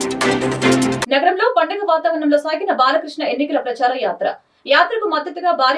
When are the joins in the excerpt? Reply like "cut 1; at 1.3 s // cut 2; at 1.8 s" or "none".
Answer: cut 1; at 1.0 s